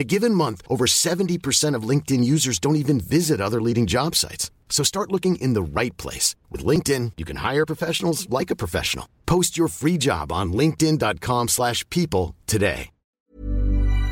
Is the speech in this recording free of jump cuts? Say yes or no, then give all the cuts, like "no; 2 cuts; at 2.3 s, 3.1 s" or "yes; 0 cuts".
no; 1 cut; at 13.1 s